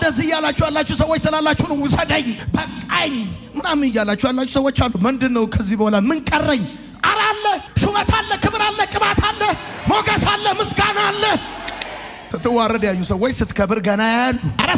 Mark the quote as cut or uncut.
uncut